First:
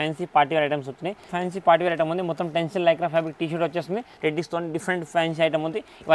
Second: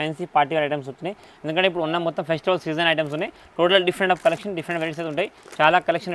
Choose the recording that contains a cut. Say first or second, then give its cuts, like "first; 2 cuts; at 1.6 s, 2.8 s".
first; 2 cuts; at 1.3 s, 4.1 s